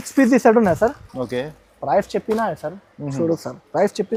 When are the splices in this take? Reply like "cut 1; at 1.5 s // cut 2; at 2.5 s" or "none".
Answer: none